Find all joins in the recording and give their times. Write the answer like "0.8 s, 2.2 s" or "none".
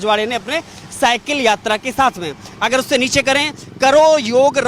none